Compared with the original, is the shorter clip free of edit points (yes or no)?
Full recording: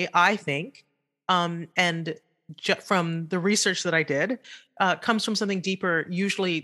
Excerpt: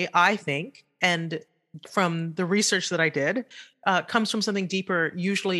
no